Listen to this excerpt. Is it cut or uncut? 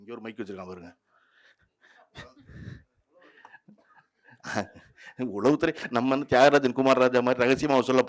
uncut